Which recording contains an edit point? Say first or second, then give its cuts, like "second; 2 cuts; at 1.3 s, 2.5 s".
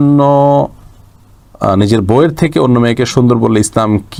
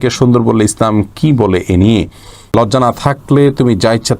second; 1 cut; at 2.5 s